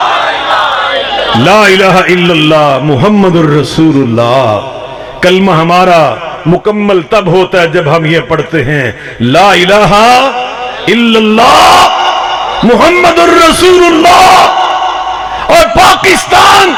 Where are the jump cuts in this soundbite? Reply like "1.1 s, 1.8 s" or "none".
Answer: none